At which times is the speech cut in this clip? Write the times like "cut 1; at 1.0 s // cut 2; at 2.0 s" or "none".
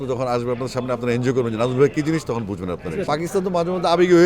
cut 1; at 3.0 s